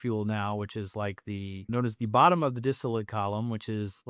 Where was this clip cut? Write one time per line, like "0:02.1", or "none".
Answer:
0:01.7

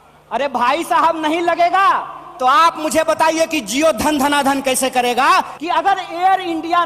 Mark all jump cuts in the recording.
0:05.5

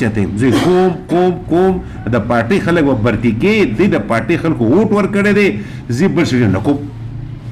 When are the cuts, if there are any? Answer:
none

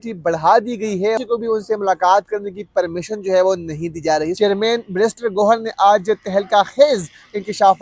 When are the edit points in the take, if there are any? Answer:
0:01.2
0:04.3

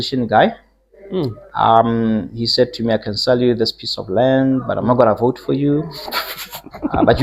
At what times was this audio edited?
none

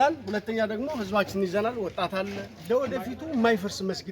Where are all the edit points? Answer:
0:02.5

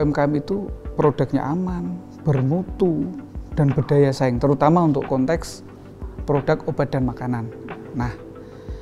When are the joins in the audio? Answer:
none

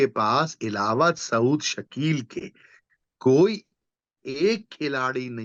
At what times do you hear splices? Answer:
none

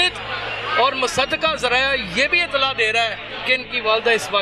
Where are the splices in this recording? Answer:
none

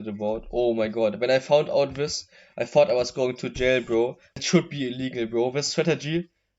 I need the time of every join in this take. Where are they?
0:04.3

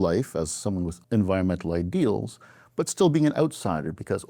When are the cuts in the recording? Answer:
0:01.0

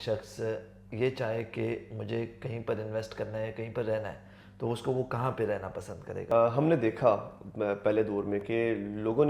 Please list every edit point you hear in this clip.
0:06.2

